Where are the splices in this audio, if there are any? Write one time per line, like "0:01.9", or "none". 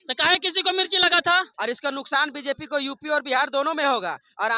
0:01.5

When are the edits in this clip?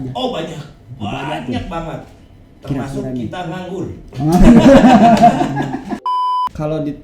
0:06.0

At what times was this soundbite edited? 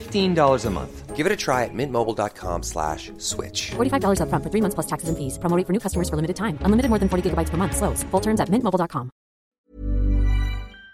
0:09.5

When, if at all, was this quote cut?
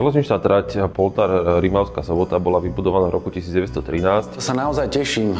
0:00.9
0:04.4

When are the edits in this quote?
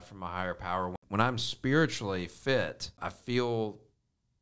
0:01.0
0:03.1

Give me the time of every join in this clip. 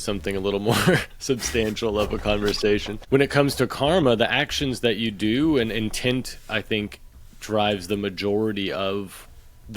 0:02.9

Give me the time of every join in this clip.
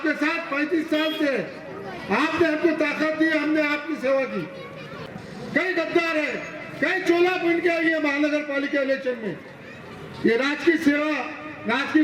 0:05.0

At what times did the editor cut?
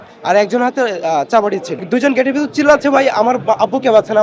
0:01.7

